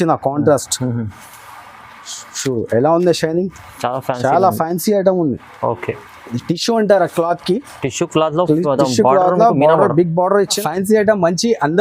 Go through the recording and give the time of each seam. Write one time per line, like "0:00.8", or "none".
0:10.5